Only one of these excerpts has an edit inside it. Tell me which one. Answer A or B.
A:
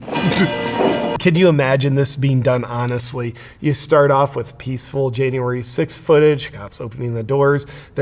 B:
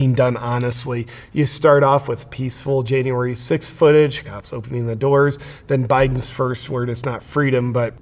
A